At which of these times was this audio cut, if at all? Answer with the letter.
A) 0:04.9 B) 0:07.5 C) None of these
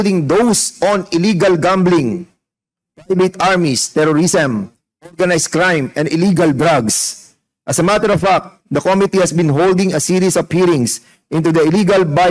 C